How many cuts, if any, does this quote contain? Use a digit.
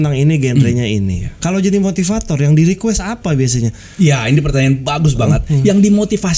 2